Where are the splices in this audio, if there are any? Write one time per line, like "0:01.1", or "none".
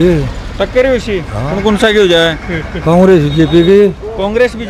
none